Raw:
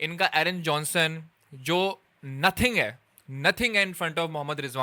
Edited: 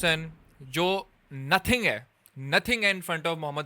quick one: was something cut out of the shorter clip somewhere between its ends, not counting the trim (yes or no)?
no